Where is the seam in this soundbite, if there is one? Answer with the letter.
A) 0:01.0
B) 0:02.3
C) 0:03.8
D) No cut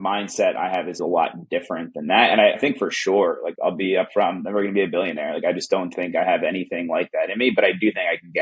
A